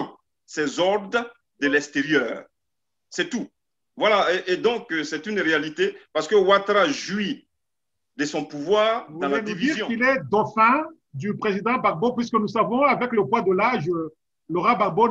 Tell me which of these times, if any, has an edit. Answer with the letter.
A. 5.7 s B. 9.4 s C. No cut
B